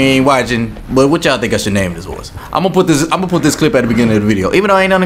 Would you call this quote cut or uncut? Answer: uncut